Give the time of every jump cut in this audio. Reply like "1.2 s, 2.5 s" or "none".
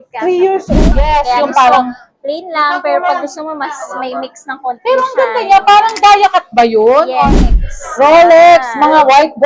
0.7 s, 7.4 s